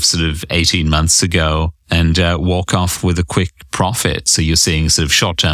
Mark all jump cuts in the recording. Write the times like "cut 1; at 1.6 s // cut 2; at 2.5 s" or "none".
cut 1; at 1.8 s